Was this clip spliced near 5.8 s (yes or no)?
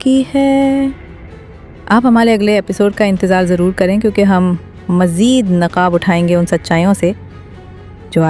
no